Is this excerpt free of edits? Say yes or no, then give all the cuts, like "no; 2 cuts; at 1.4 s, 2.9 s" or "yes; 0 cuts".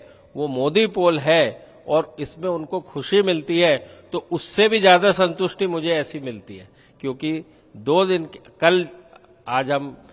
yes; 0 cuts